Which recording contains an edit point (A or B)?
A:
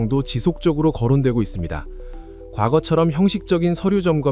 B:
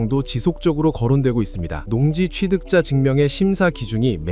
B